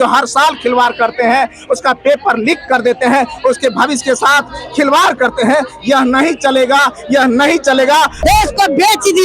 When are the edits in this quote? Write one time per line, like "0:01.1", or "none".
0:08.2